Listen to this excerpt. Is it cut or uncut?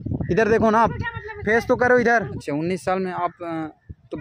cut